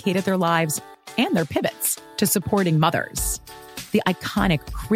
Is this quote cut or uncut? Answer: uncut